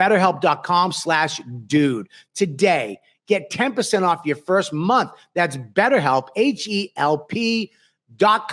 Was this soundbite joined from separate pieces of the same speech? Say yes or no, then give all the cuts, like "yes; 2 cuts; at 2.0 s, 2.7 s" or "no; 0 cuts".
no; 0 cuts